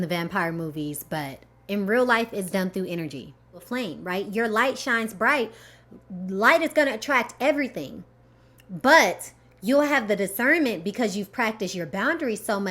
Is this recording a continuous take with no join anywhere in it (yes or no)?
no